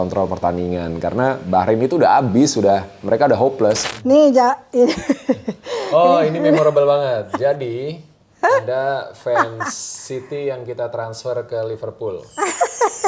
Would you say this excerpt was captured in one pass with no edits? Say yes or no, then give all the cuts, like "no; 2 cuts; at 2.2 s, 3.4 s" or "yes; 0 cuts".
no; 1 cut; at 3.8 s